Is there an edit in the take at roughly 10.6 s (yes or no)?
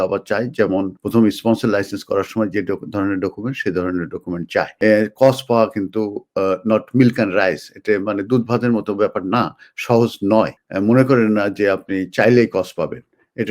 yes